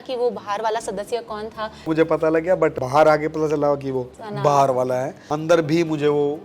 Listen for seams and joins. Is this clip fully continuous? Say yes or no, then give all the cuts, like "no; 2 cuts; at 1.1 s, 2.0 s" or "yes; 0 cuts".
no; 4 cuts; at 1.9 s, 2.8 s, 4.2 s, 5.2 s